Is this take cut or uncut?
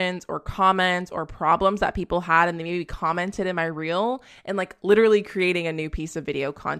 uncut